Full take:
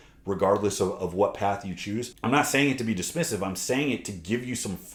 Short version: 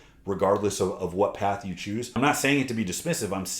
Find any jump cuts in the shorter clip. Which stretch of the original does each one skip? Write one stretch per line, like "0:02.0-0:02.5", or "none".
0:02.1-0:02.2